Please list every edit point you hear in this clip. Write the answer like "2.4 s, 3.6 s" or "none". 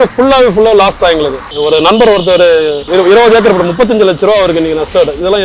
1.5 s, 2.8 s